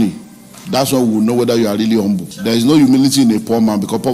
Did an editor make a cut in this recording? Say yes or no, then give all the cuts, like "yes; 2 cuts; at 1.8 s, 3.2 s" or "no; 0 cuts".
yes; 1 cut; at 2.3 s